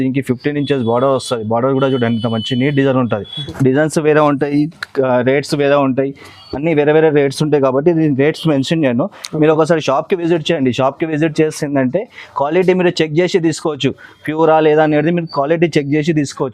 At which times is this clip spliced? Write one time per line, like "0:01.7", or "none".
0:03.4